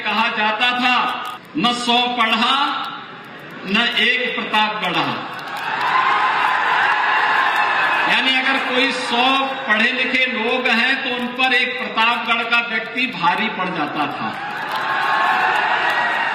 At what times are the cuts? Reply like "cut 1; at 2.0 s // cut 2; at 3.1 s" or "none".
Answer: cut 1; at 1.3 s

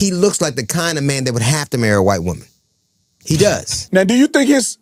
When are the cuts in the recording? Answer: none

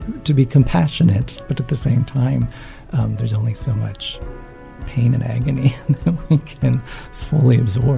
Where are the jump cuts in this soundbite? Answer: none

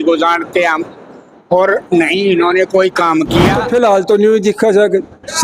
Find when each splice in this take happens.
cut 1; at 3.6 s

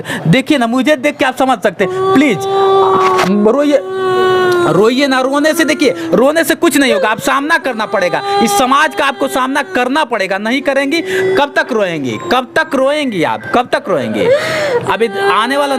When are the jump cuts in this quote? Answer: none

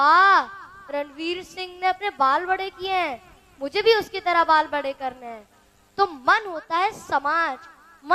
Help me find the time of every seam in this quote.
none

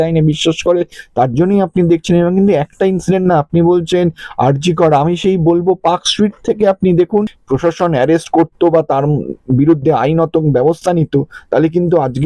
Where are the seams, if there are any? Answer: cut 1; at 7.4 s

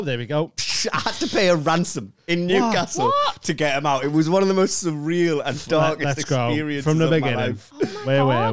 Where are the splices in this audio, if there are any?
none

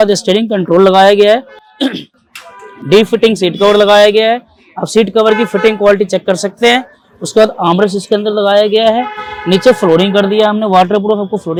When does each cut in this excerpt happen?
none

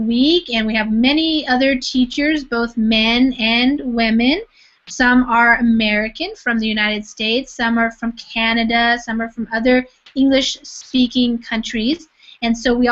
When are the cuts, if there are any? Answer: cut 1; at 9.7 s

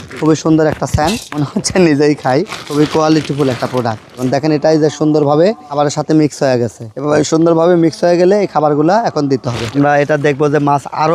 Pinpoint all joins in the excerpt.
cut 1; at 4.2 s // cut 2; at 9.6 s

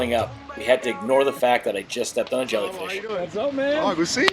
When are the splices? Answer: cut 1; at 2.8 s

